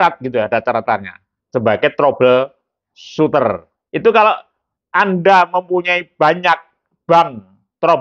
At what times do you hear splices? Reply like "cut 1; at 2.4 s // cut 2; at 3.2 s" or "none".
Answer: cut 1; at 3.7 s